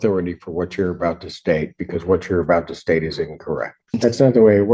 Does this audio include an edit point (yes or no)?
yes